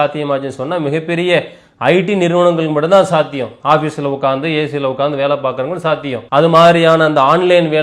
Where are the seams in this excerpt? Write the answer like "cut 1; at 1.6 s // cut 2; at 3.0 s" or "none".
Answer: cut 1; at 6.2 s